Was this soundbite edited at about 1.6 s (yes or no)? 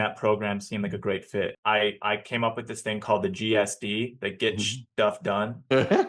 yes